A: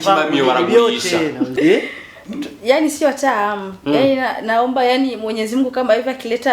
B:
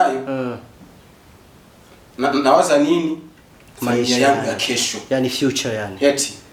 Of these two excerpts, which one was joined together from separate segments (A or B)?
A